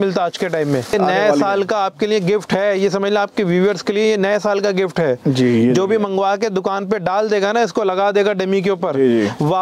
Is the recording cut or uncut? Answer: cut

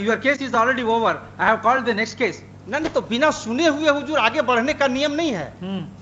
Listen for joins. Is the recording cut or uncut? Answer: uncut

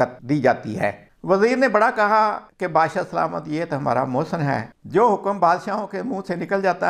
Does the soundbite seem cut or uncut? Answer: cut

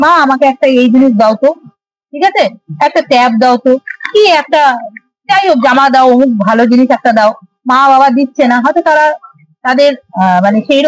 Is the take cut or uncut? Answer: uncut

